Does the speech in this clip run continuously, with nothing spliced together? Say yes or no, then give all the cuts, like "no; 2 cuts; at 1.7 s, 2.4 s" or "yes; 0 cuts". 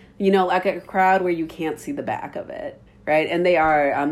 no; 1 cut; at 2.8 s